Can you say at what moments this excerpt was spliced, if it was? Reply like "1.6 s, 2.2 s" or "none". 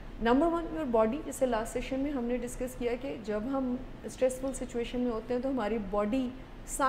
none